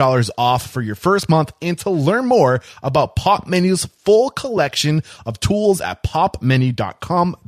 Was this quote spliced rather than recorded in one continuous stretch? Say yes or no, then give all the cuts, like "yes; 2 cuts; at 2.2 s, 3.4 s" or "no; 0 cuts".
no; 0 cuts